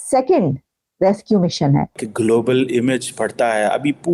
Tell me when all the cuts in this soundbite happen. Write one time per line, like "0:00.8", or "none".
0:02.0